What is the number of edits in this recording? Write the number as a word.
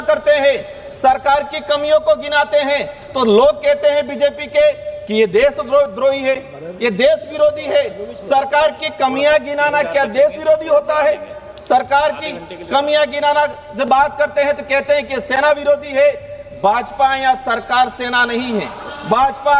zero